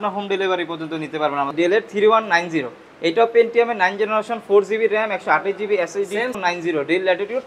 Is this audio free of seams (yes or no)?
no